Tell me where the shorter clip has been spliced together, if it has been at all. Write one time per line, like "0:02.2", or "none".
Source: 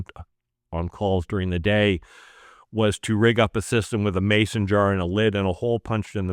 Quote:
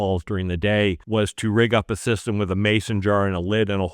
0:01.0